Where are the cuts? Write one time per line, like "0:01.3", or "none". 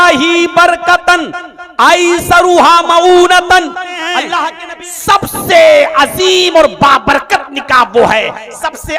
0:04.6

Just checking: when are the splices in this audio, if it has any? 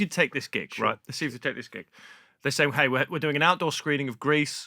none

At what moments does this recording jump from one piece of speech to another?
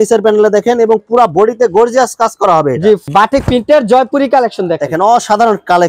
0:03.1

